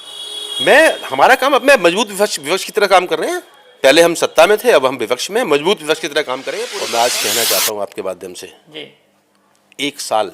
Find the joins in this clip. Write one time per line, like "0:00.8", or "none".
0:06.5